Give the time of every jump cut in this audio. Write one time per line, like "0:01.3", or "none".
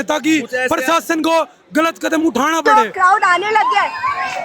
0:02.6